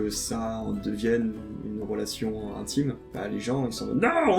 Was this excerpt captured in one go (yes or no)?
no